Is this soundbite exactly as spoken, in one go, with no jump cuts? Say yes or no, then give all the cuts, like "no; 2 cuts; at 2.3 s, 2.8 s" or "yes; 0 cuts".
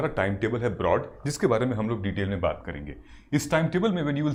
yes; 0 cuts